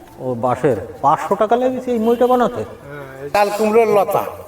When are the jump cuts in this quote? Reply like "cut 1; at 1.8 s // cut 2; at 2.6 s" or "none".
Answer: cut 1; at 3.2 s